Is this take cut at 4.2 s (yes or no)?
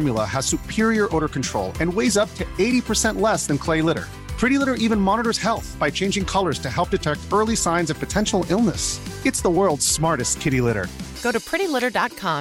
no